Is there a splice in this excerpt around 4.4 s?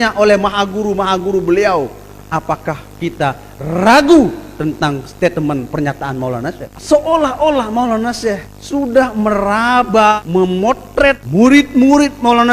no; 4 cuts; at 6.7 s, 8.5 s, 10.2 s, 11.2 s

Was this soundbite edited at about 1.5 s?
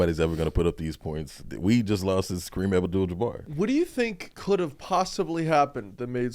yes; 3 cuts; at 1.5 s, 3.5 s, 4.3 s

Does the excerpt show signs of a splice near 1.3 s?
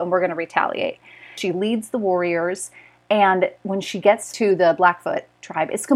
yes; 1 cut; at 1.3 s

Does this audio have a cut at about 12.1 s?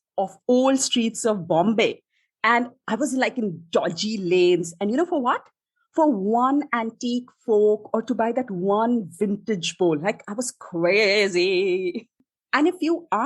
yes; 1 cut; at 12.1 s

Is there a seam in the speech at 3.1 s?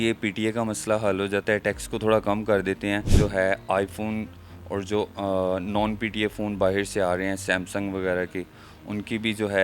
yes; 1 cut; at 3.1 s

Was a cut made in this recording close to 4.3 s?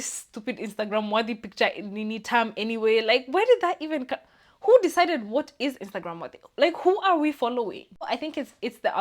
no; 1 cut; at 8.1 s

